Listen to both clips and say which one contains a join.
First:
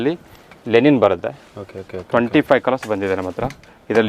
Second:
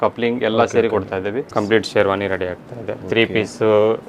second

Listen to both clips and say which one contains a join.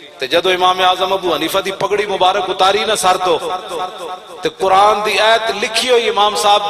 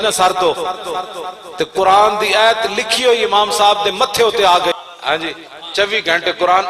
second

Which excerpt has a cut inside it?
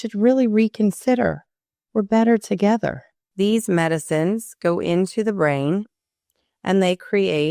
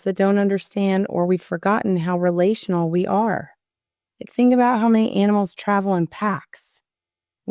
first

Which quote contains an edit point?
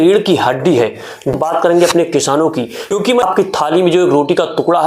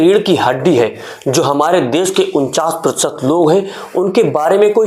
first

